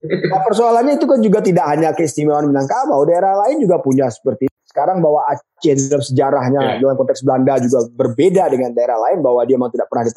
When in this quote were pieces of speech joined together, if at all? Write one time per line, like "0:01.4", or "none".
0:04.6